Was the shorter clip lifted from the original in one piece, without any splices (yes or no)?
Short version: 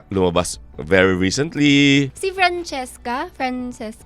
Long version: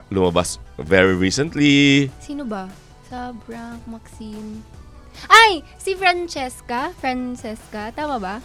no